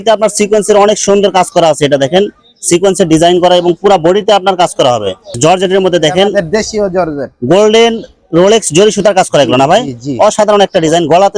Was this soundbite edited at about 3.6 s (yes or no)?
no